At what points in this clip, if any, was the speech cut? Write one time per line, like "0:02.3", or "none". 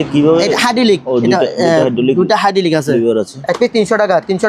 0:03.3